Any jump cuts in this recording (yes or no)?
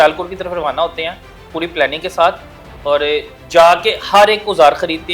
no